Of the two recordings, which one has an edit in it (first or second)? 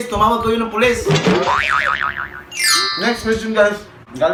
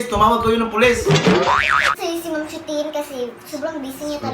second